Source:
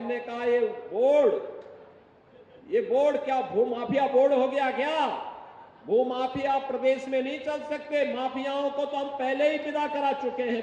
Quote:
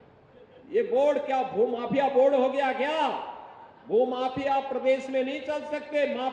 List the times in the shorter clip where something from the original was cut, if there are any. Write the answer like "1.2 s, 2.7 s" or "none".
none